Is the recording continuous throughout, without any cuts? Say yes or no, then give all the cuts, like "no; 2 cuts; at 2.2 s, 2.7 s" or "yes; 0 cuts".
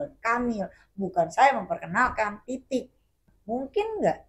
no; 1 cut; at 3.3 s